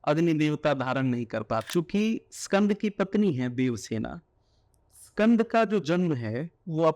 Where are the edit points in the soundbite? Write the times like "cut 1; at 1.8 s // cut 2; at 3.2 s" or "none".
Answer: cut 1; at 1.7 s